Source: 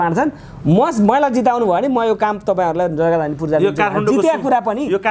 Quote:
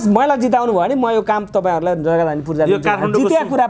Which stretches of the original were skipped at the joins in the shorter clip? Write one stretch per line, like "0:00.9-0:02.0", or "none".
none